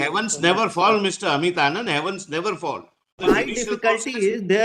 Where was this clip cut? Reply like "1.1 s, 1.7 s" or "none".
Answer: 3.2 s